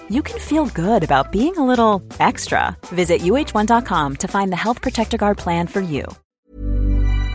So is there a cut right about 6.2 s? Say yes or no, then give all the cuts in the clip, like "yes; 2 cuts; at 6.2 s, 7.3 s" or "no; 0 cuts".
yes; 1 cut; at 6.2 s